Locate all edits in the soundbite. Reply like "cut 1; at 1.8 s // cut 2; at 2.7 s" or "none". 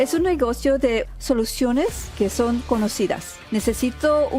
cut 1; at 1.0 s // cut 2; at 2.1 s // cut 3; at 3.4 s